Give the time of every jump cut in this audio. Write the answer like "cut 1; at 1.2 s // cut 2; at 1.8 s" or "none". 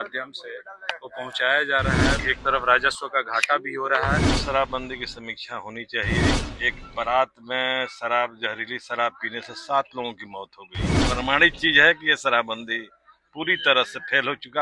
cut 1; at 2.2 s // cut 2; at 4.4 s // cut 3; at 6.4 s // cut 4; at 11.0 s